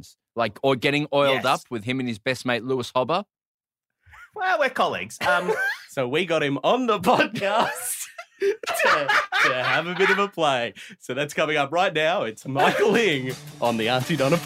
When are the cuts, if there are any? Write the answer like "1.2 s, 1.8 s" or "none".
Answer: 5.9 s